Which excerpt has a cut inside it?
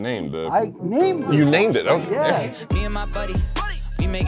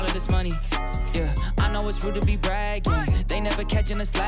first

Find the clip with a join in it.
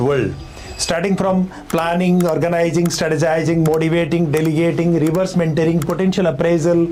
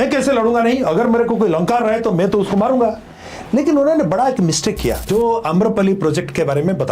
second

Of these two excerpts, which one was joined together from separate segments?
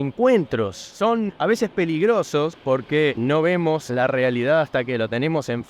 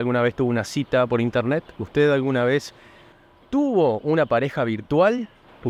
first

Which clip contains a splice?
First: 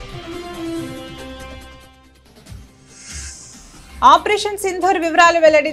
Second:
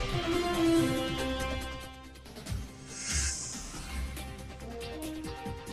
second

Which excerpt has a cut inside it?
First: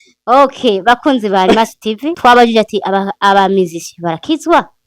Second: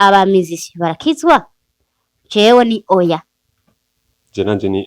first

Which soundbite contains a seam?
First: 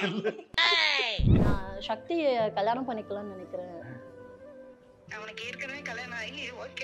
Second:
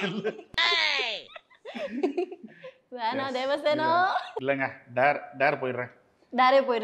first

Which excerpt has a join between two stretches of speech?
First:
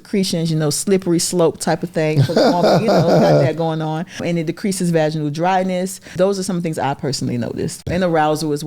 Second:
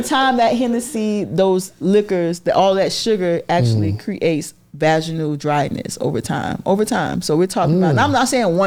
first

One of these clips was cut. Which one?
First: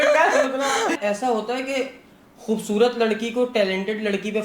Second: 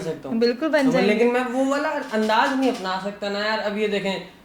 first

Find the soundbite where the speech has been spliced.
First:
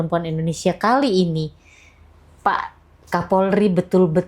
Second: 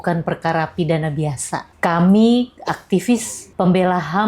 second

